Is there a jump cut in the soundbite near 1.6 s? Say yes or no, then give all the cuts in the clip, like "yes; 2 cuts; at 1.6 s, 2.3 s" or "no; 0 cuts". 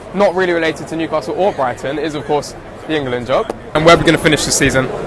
no; 1 cut; at 3.7 s